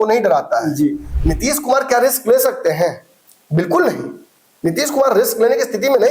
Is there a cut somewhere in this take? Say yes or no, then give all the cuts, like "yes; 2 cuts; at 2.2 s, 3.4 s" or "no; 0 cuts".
yes; 1 cut; at 1.1 s